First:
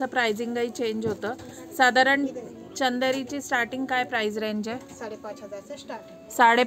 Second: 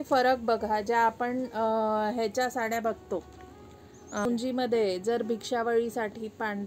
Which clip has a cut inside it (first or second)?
second